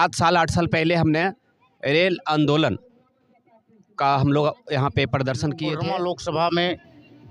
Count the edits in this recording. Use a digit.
1